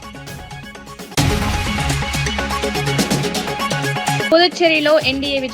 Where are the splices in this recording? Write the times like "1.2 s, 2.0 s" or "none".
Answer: 1.1 s, 4.3 s